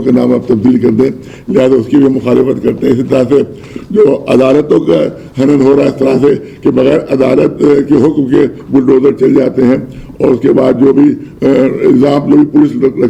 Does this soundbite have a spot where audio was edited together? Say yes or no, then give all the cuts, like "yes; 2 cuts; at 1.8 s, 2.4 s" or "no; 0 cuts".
no; 0 cuts